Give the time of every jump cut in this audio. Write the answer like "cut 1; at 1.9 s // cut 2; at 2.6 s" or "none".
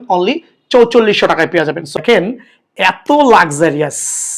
cut 1; at 1.9 s